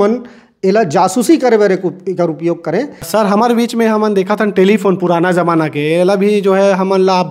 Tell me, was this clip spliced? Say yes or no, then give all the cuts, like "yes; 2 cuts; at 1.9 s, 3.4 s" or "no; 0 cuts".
yes; 1 cut; at 3.0 s